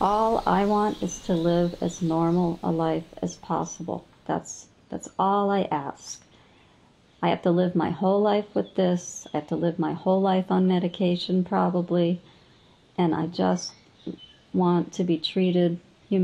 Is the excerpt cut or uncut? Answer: uncut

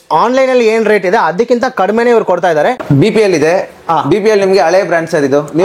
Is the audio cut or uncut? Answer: cut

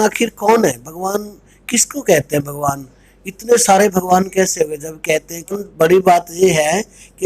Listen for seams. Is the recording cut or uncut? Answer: cut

